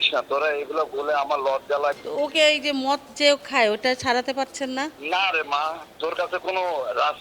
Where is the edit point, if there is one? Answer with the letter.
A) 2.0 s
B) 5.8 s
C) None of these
A